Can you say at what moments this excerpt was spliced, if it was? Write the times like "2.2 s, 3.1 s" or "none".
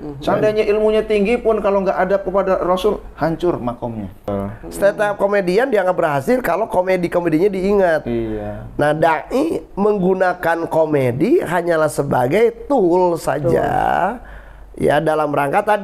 4.3 s